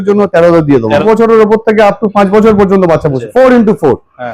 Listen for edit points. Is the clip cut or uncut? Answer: cut